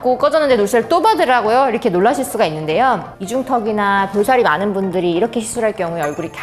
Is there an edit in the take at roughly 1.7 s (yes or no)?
no